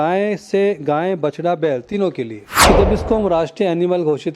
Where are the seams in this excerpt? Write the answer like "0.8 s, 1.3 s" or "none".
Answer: 2.4 s